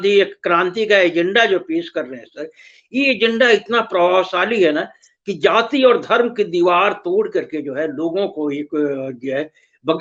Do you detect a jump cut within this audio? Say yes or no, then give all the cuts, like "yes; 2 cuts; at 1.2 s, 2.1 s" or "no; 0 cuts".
no; 0 cuts